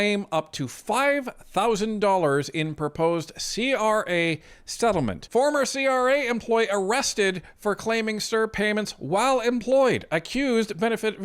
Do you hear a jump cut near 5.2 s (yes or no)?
yes